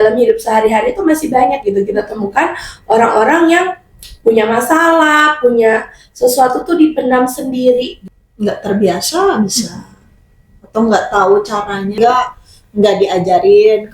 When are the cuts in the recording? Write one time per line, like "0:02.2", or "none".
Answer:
0:07.9
0:12.0